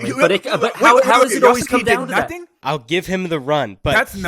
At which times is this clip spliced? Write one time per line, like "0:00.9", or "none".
0:02.4